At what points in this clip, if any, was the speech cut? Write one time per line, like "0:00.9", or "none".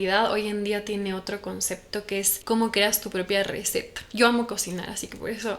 0:02.3